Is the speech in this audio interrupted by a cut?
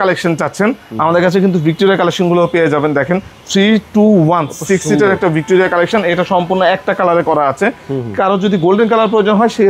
no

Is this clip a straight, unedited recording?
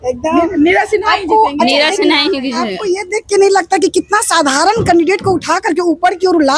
yes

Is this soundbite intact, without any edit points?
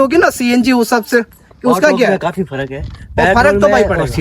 yes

